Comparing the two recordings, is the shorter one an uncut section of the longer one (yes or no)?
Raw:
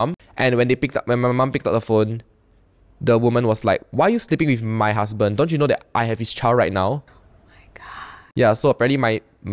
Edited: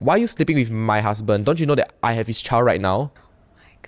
yes